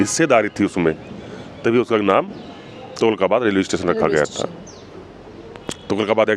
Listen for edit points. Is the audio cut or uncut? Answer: uncut